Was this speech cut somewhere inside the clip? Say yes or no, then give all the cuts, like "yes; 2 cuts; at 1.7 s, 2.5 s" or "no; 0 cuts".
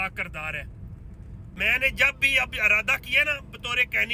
yes; 1 cut; at 1.5 s